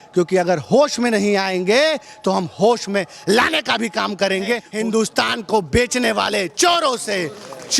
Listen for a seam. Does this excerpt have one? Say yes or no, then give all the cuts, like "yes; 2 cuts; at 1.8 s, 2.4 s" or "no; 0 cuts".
yes; 1 cut; at 4.7 s